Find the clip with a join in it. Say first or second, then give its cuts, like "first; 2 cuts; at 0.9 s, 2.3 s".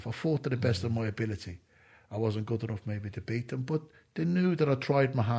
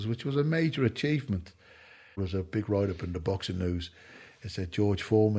second; 1 cut; at 2.2 s